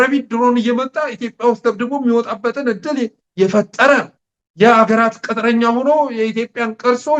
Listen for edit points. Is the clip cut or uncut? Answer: uncut